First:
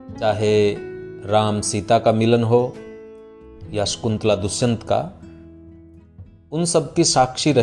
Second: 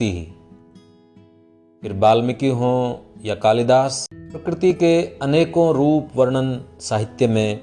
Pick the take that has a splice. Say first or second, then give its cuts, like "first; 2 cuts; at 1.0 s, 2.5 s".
second; 1 cut; at 4.6 s